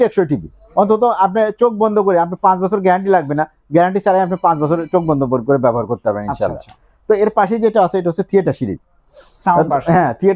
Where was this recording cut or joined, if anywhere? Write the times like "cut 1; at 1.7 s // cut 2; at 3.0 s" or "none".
none

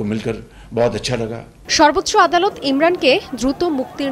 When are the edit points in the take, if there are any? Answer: cut 1; at 1.6 s

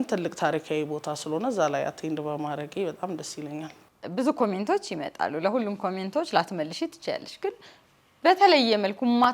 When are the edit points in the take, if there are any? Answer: cut 1; at 3.9 s

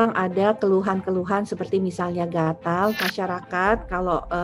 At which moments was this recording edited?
cut 1; at 3.0 s

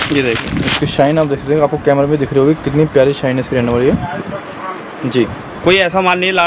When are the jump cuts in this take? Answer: none

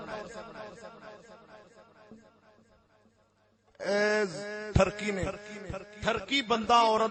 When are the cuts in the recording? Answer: none

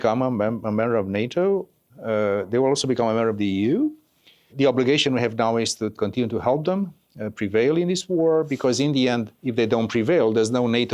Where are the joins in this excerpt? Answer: cut 1; at 1.9 s // cut 2; at 4.5 s // cut 3; at 5.9 s

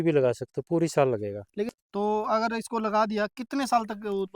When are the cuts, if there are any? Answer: cut 1; at 1.7 s

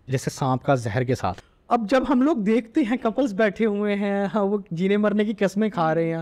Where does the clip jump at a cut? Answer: cut 1; at 1.5 s

